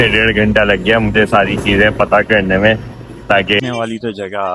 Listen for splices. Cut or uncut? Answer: cut